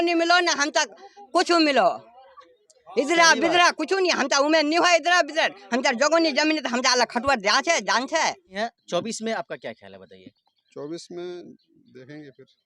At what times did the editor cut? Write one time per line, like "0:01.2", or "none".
0:08.3